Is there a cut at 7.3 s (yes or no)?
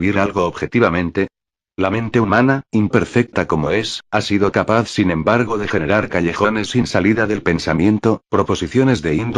yes